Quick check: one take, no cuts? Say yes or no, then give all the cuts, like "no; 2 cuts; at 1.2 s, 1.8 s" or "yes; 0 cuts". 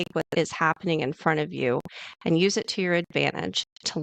yes; 0 cuts